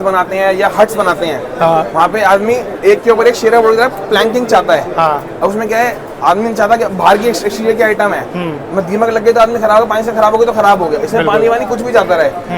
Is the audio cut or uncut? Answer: uncut